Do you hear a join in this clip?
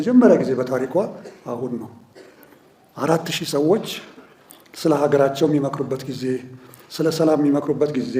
no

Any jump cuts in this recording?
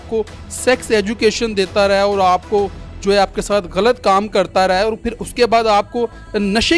no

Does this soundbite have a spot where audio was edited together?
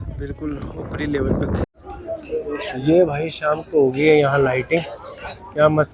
yes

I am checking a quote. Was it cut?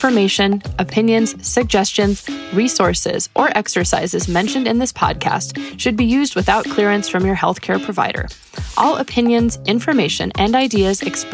no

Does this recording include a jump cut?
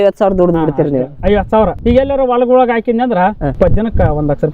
yes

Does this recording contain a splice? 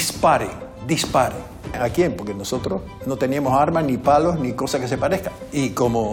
yes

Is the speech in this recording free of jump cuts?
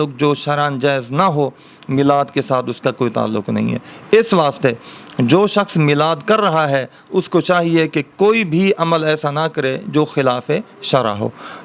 yes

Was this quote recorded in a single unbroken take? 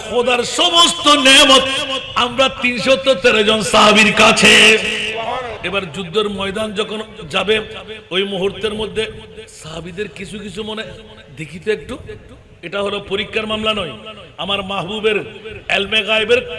no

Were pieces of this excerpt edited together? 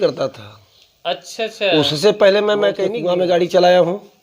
yes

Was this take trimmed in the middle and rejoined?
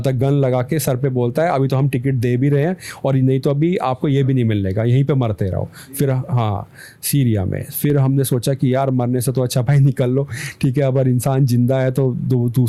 no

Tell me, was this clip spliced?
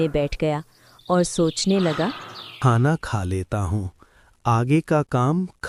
no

